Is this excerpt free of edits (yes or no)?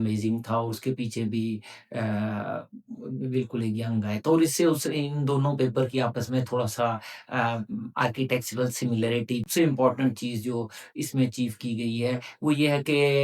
no